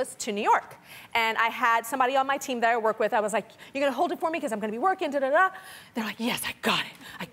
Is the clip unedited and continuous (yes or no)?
no